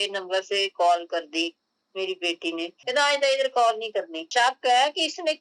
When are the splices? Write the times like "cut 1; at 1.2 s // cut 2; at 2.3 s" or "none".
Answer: cut 1; at 2.7 s // cut 2; at 4.3 s